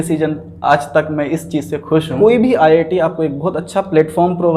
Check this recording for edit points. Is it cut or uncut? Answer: cut